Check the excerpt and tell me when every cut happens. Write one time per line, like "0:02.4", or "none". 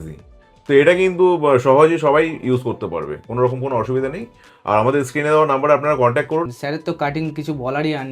0:06.5